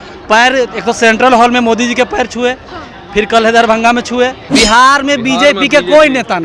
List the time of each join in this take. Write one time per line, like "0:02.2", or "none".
0:04.4